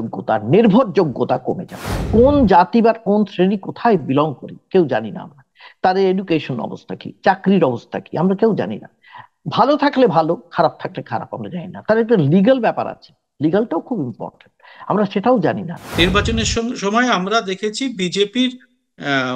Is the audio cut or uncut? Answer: cut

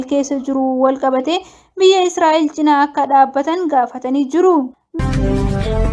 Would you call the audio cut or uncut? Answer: cut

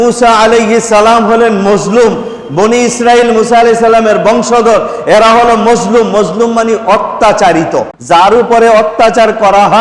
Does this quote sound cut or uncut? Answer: cut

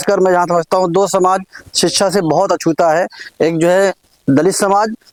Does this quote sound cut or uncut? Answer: uncut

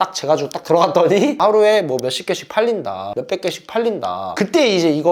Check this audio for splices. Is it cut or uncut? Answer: cut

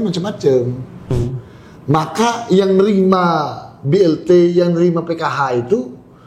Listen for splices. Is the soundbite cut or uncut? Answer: cut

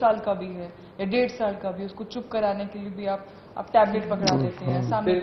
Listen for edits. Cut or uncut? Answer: uncut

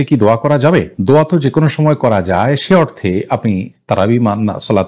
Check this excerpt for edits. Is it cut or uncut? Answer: uncut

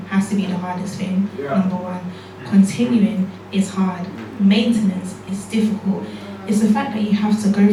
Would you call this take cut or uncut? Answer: uncut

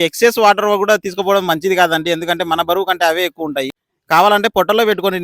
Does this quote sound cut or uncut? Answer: cut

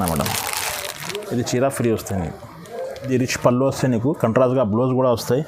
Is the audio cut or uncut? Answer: cut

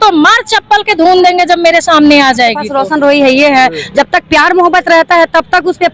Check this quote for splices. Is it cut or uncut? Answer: cut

